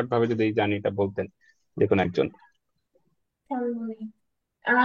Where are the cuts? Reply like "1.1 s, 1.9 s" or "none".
none

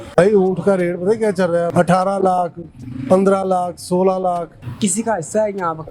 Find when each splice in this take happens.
1.7 s, 4.6 s

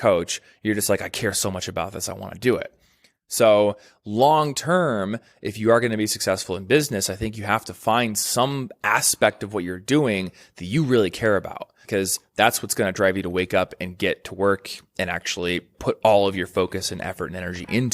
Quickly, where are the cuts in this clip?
11.8 s, 15.8 s

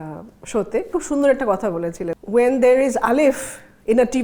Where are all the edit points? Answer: 0.9 s, 2.1 s

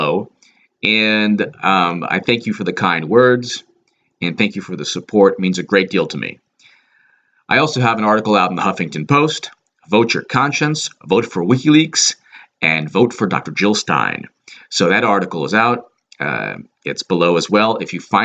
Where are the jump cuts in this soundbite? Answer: 7.9 s

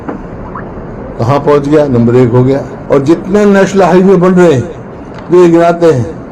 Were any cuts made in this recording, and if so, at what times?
2.7 s

